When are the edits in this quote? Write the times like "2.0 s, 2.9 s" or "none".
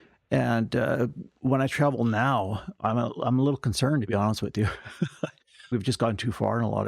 5.7 s